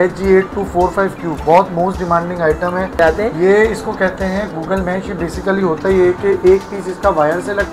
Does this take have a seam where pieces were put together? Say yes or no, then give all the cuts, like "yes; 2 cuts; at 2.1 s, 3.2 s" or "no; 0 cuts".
yes; 1 cut; at 3.0 s